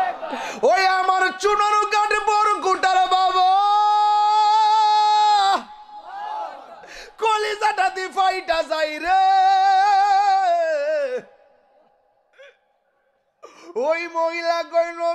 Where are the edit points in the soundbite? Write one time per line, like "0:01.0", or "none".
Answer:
none